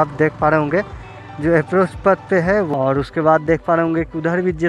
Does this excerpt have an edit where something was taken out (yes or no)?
yes